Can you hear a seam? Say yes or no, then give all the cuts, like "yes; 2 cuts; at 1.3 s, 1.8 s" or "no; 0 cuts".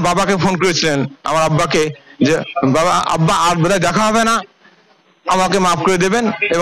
no; 0 cuts